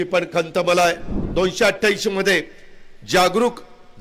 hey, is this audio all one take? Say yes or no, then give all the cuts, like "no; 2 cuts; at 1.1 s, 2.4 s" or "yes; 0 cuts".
no; 1 cut; at 1.2 s